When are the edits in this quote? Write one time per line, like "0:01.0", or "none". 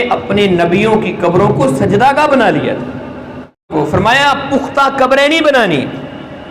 0:03.7